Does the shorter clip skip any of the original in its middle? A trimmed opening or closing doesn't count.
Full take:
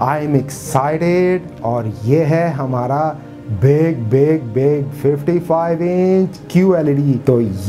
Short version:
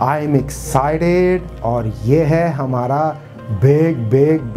no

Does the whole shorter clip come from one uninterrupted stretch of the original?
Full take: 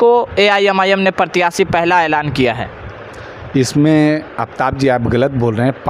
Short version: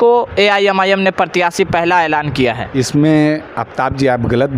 no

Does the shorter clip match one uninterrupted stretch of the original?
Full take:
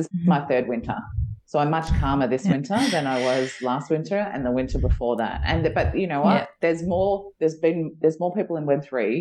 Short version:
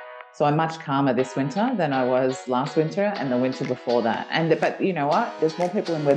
no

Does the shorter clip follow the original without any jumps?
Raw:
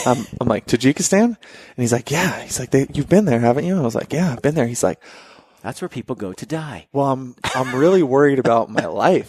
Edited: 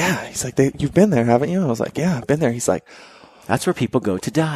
yes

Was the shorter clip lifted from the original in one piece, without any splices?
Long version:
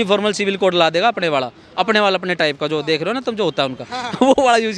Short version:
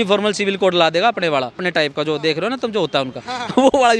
no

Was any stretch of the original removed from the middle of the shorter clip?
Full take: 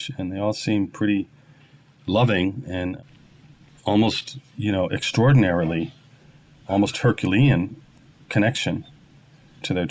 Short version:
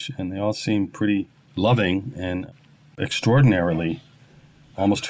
yes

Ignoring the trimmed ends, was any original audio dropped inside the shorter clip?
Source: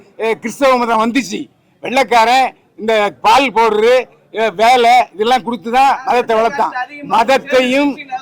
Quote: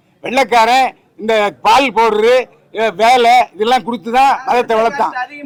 no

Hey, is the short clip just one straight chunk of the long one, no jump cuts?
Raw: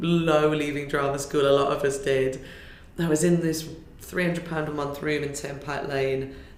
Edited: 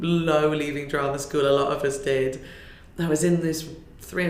yes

